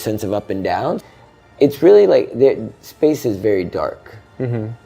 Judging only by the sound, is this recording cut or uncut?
cut